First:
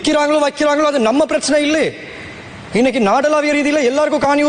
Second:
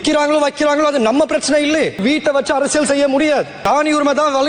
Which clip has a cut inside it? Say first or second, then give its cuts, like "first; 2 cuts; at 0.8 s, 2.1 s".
second; 2 cuts; at 2.0 s, 3.5 s